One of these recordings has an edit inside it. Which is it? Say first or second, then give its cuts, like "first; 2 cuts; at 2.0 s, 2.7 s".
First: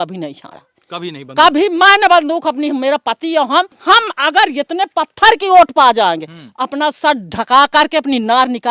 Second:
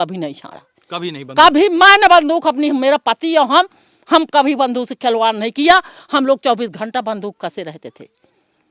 first; 1 cut; at 3.8 s